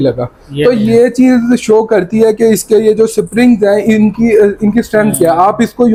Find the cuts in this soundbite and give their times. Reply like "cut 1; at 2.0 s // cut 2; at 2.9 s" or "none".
none